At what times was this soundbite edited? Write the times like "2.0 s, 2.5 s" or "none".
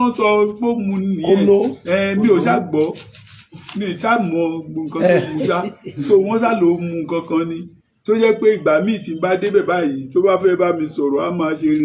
none